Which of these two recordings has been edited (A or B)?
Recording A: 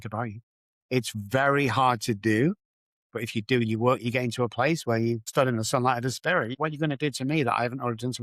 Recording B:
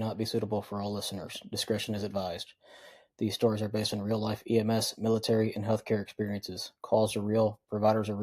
A